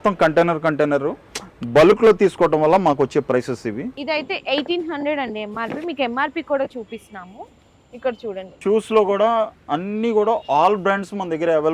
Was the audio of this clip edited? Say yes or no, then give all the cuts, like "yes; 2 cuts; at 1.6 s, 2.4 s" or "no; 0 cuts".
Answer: yes; 2 cuts; at 3.9 s, 8.5 s